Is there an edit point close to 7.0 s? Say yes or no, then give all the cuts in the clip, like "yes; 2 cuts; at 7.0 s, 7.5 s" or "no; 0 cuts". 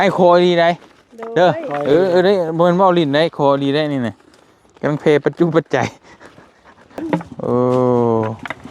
yes; 1 cut; at 7.0 s